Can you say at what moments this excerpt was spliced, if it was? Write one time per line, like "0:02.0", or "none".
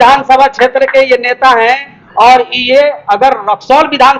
none